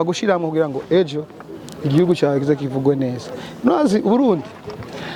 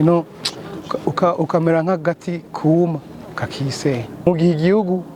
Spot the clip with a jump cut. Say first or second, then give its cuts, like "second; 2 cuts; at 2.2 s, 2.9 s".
second; 1 cut; at 4.3 s